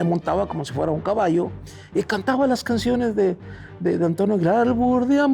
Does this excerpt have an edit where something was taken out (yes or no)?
no